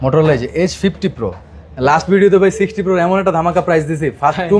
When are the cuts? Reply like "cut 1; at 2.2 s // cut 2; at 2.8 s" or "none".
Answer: none